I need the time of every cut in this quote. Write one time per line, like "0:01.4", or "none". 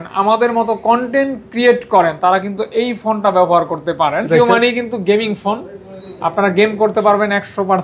0:04.3